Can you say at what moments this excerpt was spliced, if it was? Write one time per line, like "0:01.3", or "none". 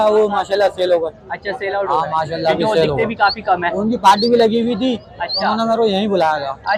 none